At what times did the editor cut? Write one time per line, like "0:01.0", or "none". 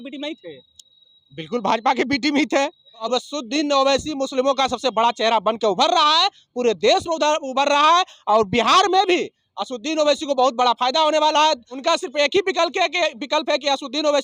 0:03.0
0:11.7